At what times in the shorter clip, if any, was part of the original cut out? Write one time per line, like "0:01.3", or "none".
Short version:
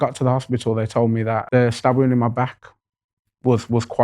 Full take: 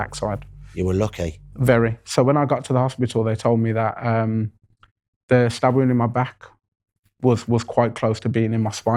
0:01.4